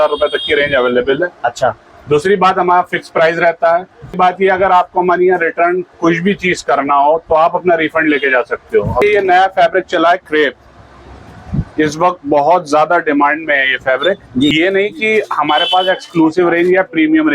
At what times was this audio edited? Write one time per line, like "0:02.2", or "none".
0:04.2
0:09.0
0:14.5